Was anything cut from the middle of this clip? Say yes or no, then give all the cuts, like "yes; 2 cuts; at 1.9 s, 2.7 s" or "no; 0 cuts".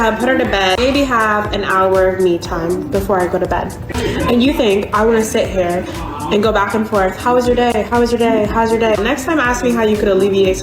yes; 3 cuts; at 0.8 s, 3.8 s, 9.0 s